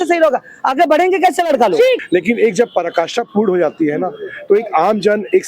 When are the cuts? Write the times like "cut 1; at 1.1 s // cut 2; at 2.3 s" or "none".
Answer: cut 1; at 2.0 s